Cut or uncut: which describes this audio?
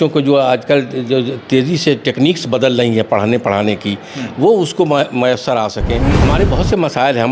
cut